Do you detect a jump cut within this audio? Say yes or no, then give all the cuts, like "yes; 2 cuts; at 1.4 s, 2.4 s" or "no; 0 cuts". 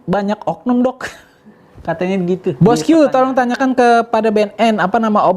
yes; 1 cut; at 2.6 s